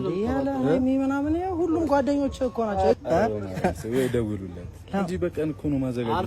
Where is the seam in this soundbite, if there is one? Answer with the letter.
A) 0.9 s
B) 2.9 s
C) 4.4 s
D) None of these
B